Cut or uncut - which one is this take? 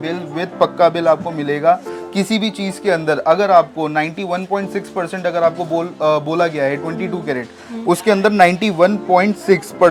uncut